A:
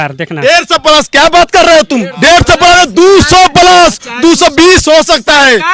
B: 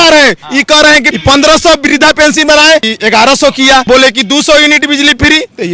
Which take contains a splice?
B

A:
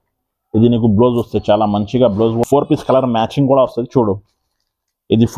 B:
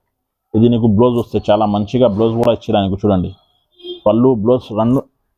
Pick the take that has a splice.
A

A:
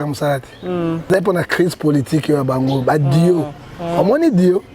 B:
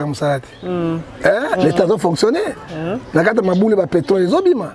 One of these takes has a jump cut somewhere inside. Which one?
A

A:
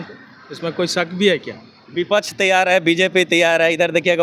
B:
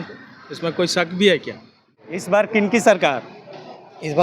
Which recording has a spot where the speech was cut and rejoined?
B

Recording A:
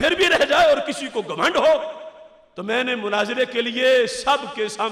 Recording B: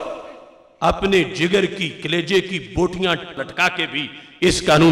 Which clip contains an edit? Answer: B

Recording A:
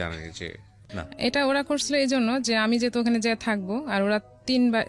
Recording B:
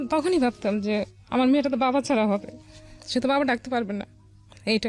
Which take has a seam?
A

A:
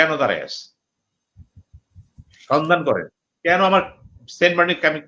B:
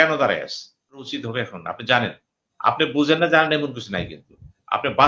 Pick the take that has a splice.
B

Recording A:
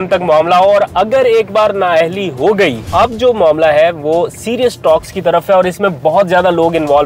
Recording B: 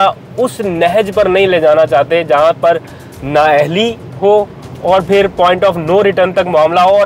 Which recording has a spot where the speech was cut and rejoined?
A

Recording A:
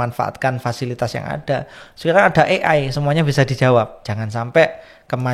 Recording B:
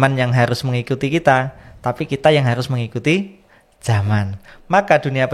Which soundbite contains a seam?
A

